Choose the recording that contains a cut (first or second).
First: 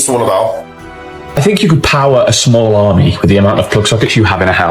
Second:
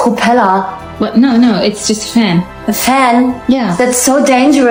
first